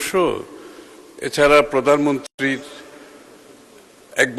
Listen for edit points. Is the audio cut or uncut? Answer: uncut